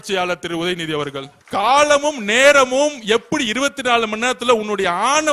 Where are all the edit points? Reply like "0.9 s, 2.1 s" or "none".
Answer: 1.3 s